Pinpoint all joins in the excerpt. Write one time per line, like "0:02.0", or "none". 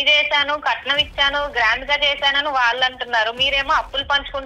none